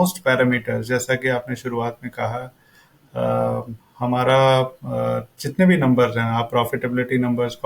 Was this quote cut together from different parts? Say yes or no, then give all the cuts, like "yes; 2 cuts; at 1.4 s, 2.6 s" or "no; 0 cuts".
no; 0 cuts